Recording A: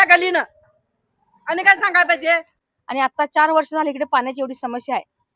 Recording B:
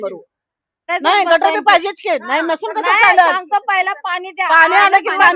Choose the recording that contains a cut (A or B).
A